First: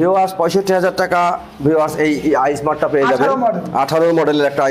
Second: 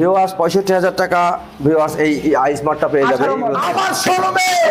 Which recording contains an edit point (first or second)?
second